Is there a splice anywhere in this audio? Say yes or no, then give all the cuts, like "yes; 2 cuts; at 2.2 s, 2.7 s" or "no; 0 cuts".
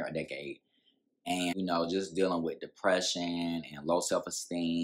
yes; 1 cut; at 1.5 s